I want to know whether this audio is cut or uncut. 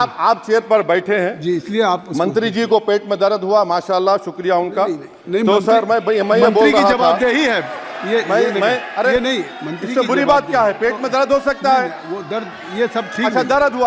uncut